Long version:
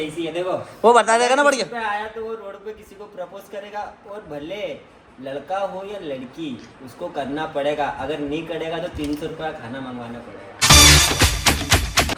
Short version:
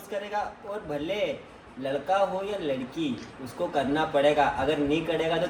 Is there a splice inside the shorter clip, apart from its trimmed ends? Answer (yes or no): no